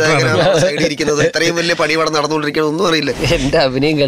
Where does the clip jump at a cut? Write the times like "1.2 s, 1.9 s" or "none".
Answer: 3.2 s